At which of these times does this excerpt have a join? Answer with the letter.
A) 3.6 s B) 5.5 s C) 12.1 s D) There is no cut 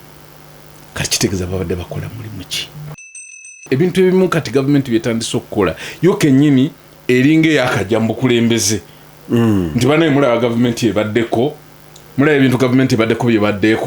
A